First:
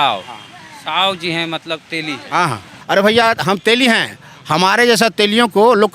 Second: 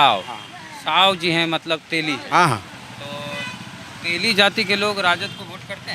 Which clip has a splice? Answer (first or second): first